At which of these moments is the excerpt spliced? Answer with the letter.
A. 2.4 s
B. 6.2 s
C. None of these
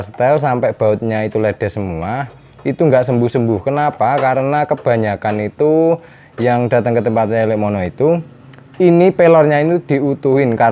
C